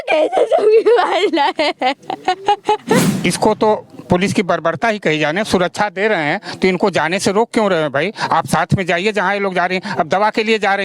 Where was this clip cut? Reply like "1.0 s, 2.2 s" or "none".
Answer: 3.1 s